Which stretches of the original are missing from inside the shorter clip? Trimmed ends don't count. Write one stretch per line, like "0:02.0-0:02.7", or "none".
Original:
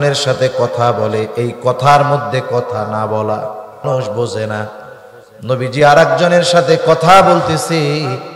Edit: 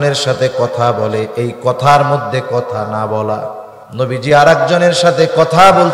0:03.6-0:05.1